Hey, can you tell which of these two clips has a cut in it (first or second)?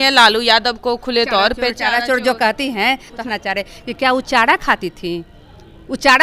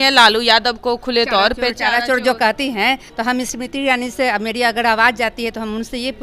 first